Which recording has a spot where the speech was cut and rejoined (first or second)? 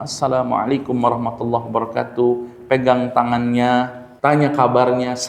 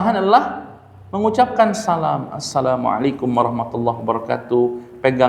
first